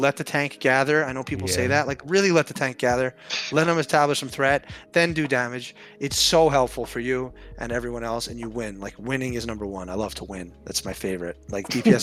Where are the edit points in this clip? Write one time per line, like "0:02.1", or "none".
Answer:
none